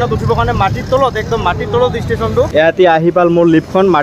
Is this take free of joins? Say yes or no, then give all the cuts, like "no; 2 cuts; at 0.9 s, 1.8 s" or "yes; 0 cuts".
no; 1 cut; at 2.5 s